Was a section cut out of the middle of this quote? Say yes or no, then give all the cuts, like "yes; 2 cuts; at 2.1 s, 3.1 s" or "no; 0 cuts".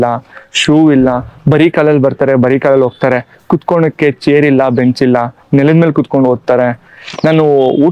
no; 0 cuts